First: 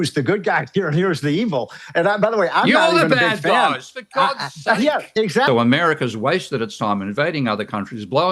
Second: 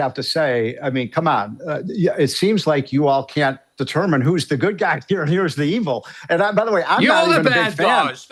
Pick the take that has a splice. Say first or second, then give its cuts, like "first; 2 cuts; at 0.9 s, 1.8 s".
first; 1 cut; at 5.5 s